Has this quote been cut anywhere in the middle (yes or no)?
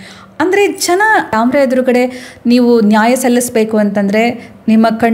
yes